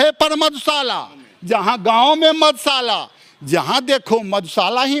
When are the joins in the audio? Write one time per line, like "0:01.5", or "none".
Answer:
none